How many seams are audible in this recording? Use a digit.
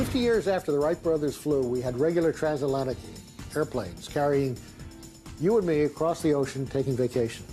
1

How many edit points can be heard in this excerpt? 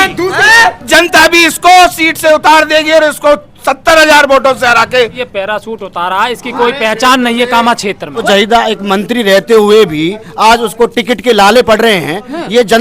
2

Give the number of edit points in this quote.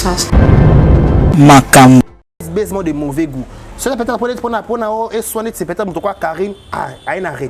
1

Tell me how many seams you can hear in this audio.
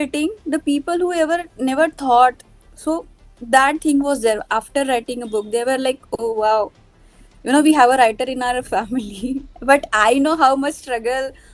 0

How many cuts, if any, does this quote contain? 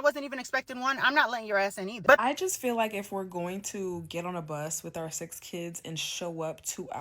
1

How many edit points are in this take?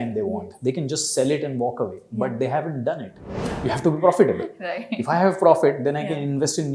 1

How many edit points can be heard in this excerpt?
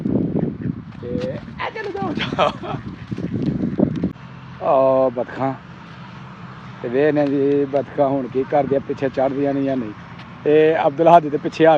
1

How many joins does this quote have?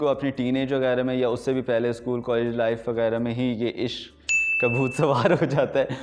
0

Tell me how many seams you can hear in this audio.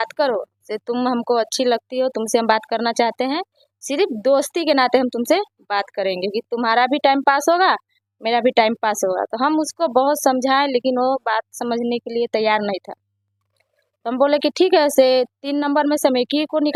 0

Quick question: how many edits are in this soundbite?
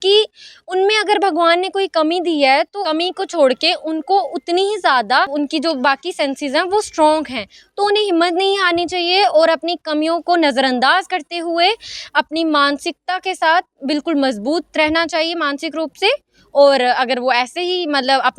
0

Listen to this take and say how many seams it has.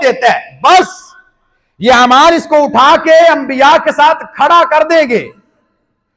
0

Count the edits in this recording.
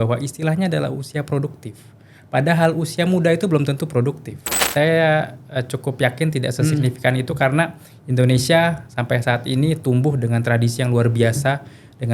1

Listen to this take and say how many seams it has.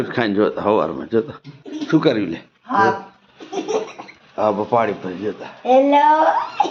0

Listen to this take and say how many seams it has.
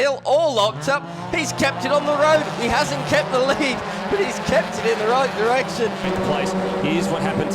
1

